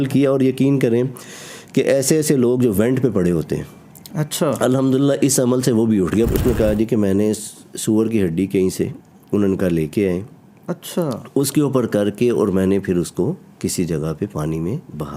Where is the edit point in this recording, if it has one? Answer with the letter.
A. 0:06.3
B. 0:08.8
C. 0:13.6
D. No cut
A